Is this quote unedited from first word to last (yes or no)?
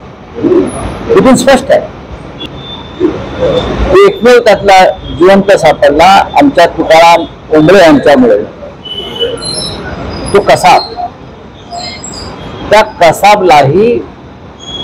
no